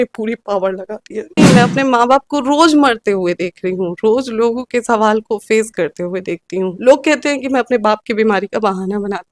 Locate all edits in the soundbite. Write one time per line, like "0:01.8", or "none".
0:01.4
0:06.8